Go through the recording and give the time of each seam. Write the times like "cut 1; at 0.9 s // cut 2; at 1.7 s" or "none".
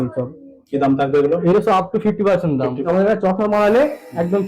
cut 1; at 2.8 s